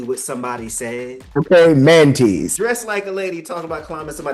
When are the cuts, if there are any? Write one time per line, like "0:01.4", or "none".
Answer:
0:01.2
0:02.5